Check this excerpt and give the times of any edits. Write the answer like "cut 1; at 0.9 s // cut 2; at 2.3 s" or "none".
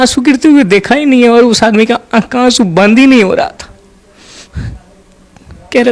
none